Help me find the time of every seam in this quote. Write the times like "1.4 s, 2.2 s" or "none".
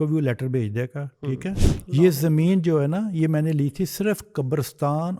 1.7 s